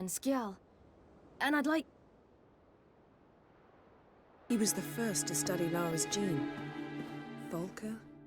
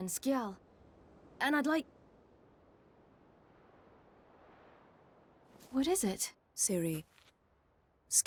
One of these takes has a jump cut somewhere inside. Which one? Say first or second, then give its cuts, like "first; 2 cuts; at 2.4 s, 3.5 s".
first; 1 cut; at 4.4 s